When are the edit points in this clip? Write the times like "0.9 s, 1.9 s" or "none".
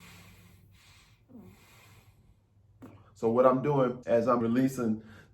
4.4 s